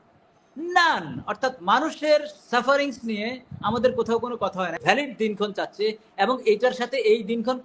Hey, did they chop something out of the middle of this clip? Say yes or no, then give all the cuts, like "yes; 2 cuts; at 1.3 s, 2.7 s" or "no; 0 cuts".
yes; 1 cut; at 4.8 s